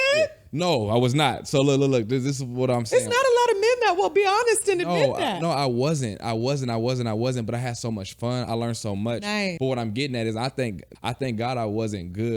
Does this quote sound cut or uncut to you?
cut